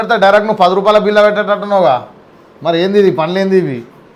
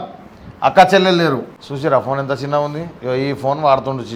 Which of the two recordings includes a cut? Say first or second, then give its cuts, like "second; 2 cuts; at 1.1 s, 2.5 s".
second; 1 cut; at 1.6 s